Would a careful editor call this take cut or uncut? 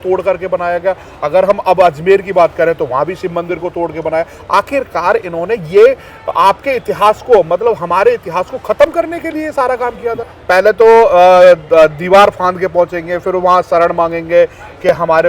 cut